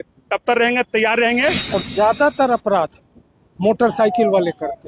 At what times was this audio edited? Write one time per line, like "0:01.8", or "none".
0:01.7